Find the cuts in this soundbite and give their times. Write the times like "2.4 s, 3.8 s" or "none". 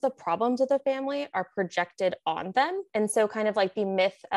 2.8 s

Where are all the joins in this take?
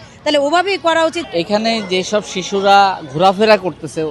1.2 s

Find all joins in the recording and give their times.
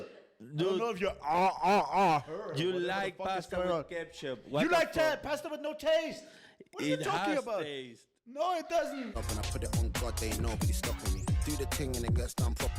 9.1 s

